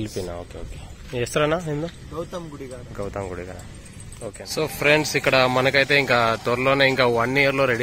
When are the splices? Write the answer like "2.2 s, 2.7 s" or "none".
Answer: 4.4 s